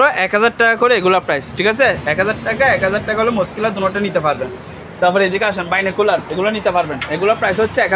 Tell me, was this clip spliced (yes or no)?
no